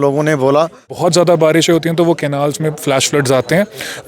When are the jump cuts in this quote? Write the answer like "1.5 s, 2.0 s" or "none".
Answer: 0.9 s